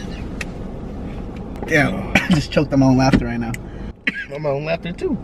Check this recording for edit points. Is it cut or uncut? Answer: cut